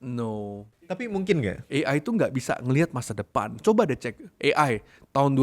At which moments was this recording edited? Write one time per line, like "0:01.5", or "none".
0:00.9
0:01.6